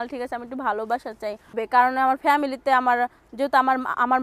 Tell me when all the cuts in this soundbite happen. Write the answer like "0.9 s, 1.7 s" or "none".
1.6 s